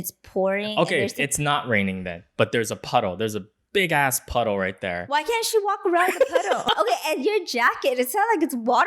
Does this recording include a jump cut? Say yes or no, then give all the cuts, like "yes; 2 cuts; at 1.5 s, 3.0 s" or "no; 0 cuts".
yes; 1 cut; at 6.6 s